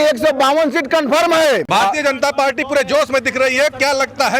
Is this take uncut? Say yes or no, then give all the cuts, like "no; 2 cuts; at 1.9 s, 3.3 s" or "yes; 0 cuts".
no; 1 cut; at 1.7 s